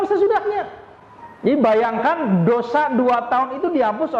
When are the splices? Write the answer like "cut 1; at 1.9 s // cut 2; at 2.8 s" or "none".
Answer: none